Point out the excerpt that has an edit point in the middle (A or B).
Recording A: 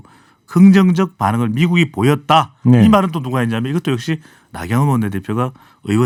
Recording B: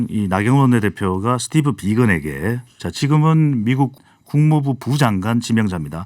B